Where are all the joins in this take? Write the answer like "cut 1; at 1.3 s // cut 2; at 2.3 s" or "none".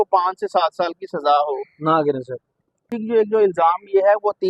cut 1; at 2.9 s